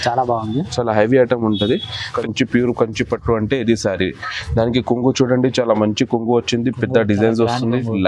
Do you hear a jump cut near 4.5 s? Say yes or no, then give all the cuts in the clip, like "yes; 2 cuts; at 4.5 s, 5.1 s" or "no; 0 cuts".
no; 1 cut; at 2.2 s